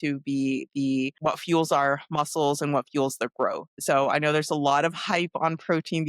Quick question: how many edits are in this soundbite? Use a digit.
1